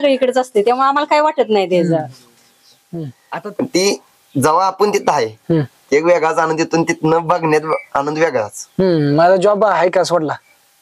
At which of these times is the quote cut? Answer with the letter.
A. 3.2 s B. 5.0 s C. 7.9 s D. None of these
A